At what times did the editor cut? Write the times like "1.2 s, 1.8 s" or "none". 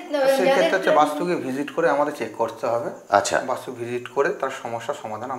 none